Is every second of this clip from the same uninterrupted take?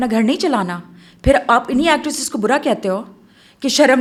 yes; 0 cuts

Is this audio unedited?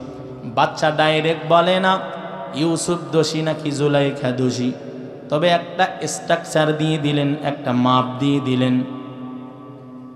yes; 0 cuts

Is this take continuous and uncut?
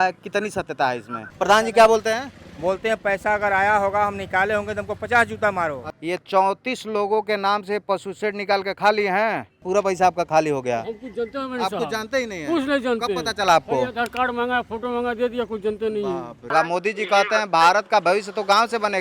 no; 4 cuts; at 1.2 s, 5.9 s, 9.7 s, 16.4 s

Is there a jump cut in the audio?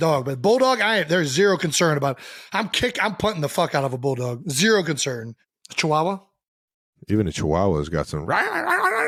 no; 0 cuts

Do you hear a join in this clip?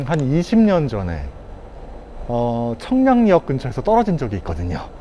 no; 0 cuts

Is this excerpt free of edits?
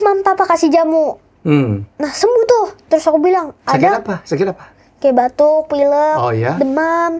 yes; 0 cuts

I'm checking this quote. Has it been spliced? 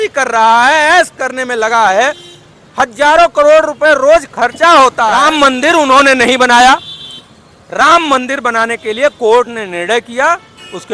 yes; 1 cut; at 5.2 s

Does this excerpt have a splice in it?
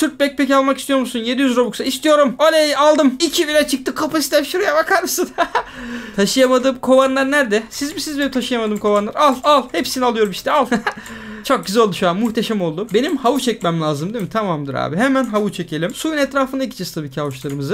no; 0 cuts

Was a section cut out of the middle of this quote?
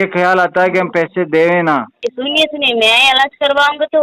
yes; 1 cut; at 2.1 s

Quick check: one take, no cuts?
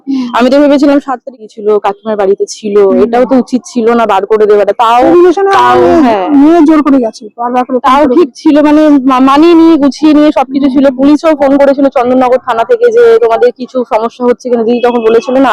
no; 1 cut; at 1.4 s

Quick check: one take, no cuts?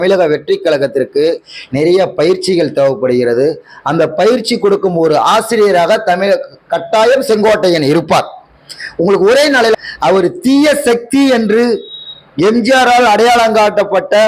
no; 1 cut; at 9.8 s

